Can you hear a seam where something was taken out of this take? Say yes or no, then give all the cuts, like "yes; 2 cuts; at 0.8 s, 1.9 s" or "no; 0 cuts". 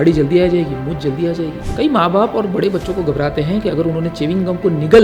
yes; 1 cut; at 1.6 s